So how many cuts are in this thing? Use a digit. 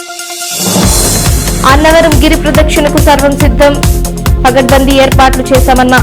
1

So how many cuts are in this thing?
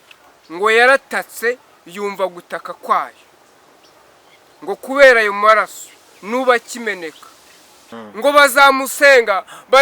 1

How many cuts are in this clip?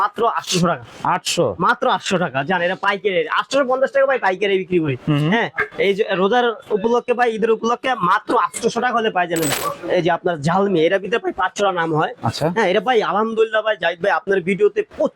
1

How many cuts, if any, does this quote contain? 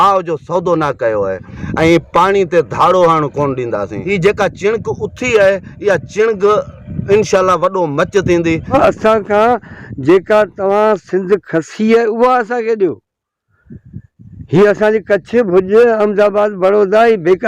3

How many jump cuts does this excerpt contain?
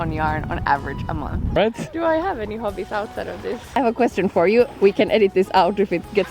3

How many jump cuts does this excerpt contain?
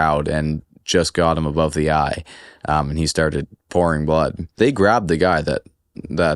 1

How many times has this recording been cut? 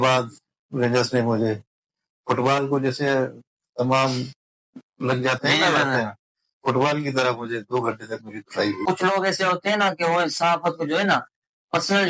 1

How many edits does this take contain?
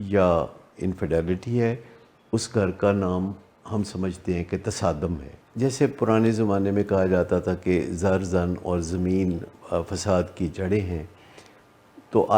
1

